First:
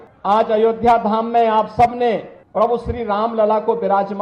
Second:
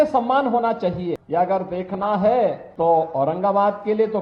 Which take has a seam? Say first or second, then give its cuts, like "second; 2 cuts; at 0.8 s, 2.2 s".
second; 2 cuts; at 1.2 s, 2.6 s